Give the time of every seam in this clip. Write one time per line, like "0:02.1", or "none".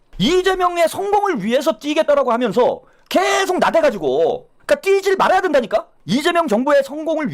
0:04.5
0:06.0